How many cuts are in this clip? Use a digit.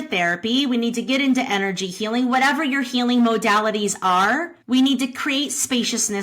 1